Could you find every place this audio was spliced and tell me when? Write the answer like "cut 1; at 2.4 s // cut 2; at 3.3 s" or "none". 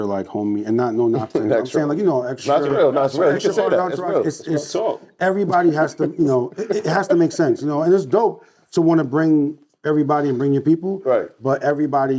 none